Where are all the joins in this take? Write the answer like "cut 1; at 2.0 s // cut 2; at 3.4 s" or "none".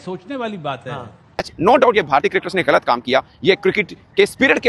cut 1; at 1.5 s